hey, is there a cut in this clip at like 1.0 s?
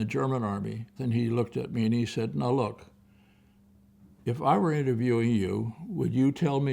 yes; 1 cut; at 1.0 s

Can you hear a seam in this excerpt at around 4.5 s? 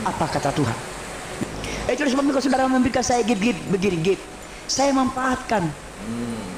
no; 1 cut; at 1.6 s

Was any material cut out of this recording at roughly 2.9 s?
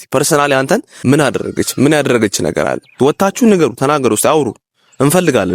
yes; 2 cuts; at 0.9 s, 2.9 s

